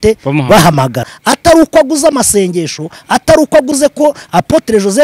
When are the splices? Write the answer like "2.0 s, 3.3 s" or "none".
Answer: 1.0 s

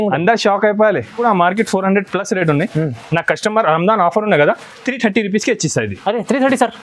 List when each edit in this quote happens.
1.2 s

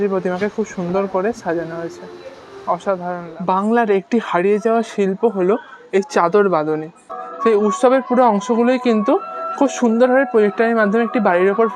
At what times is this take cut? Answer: 3.4 s, 7.2 s

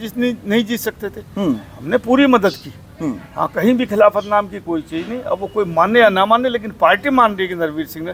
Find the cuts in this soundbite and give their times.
none

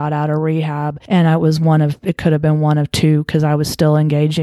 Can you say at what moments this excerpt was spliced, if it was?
1.0 s

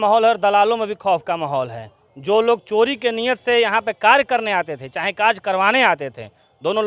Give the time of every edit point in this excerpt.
none

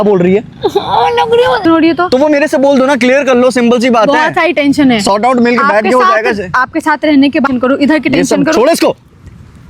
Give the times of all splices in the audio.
1.6 s, 7.5 s

